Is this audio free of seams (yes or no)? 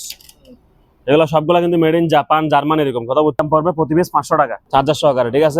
no